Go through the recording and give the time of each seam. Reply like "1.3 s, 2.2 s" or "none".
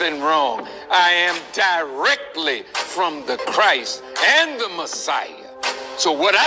none